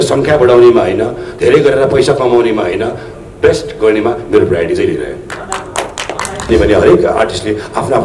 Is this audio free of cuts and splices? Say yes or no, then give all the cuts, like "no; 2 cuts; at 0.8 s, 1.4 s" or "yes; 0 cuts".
no; 1 cut; at 6.5 s